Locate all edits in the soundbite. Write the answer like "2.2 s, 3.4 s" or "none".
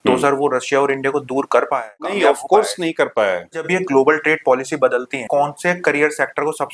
2.1 s, 3.7 s, 5.2 s